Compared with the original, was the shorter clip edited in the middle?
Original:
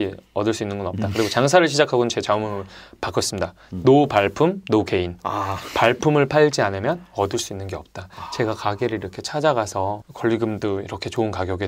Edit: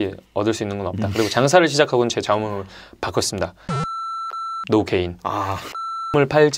no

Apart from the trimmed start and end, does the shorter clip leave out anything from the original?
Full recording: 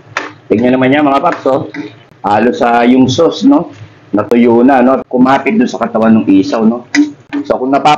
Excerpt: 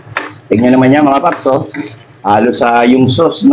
no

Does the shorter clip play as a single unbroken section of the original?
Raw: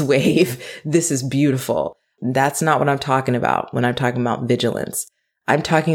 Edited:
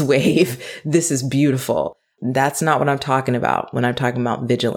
yes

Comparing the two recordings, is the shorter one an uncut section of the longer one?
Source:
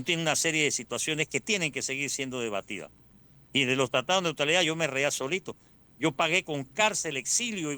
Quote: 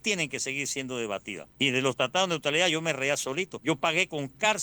no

